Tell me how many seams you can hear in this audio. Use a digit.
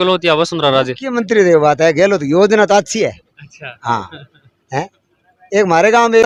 0